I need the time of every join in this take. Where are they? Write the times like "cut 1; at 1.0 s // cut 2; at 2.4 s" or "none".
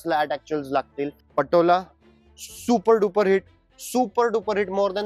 cut 1; at 1.2 s